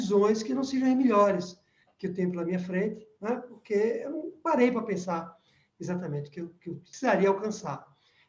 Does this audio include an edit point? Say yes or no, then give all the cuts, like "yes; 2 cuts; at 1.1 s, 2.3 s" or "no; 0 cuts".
yes; 1 cut; at 6.9 s